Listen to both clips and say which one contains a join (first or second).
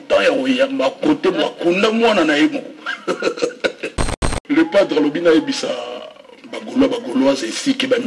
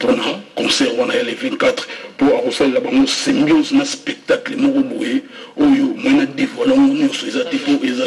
first